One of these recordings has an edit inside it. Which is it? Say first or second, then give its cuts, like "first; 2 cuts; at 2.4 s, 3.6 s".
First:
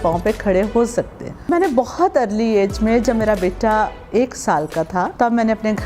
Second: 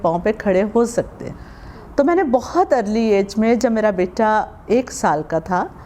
first; 2 cuts; at 1.5 s, 5.1 s